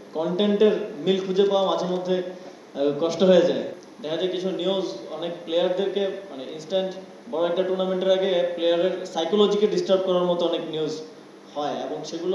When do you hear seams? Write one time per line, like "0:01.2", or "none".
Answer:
0:03.9